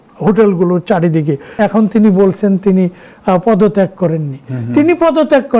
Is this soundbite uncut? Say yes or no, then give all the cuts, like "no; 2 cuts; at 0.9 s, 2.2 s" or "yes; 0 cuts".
no; 1 cut; at 1.5 s